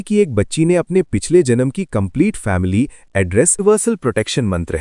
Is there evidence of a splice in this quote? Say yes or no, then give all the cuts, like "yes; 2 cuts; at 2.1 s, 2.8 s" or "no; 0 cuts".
yes; 1 cut; at 3.6 s